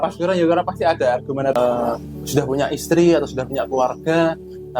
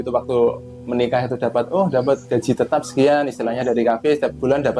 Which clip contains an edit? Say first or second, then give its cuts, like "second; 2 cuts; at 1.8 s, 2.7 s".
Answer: first; 1 cut; at 1.5 s